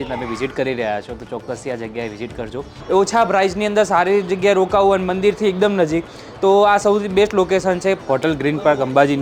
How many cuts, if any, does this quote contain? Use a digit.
2